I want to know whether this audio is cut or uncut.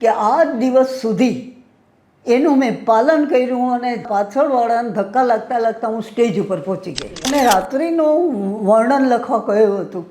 cut